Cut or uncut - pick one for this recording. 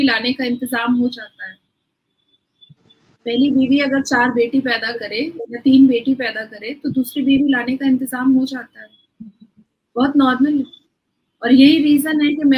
uncut